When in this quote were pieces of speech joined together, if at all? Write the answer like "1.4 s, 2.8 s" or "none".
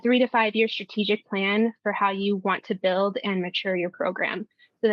none

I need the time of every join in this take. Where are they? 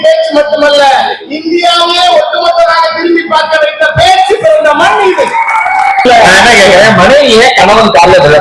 6.0 s

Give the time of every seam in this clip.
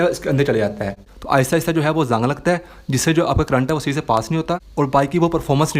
1.0 s

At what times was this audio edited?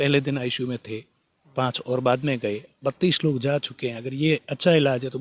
none

